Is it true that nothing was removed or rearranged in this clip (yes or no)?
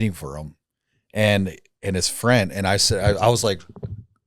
yes